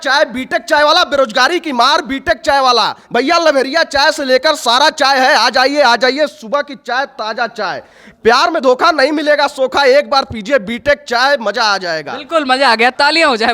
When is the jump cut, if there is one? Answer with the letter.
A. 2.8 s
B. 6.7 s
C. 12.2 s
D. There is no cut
D